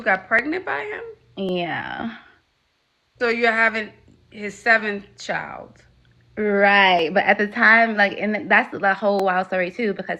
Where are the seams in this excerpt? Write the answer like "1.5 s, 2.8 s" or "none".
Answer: none